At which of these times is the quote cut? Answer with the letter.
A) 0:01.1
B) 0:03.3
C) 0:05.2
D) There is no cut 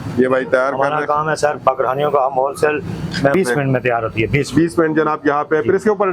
B